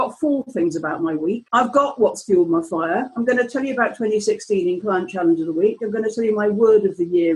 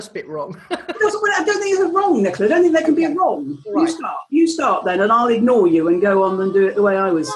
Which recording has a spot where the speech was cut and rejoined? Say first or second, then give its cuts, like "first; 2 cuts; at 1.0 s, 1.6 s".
first; 1 cut; at 1.4 s